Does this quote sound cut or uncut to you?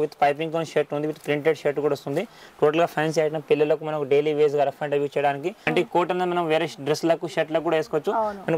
cut